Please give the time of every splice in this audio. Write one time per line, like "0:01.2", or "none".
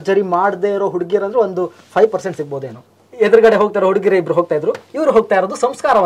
0:03.0